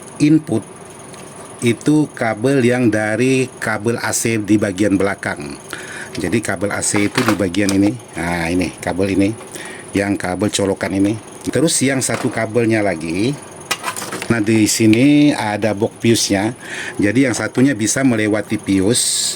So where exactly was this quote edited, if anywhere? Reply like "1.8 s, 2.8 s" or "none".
11.3 s, 14.3 s